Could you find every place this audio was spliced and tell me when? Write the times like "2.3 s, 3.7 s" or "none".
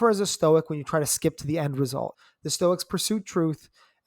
2.2 s